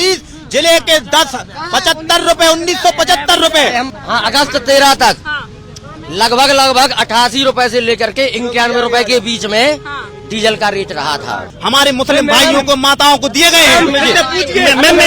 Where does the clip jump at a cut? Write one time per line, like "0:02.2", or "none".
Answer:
0:03.9
0:11.5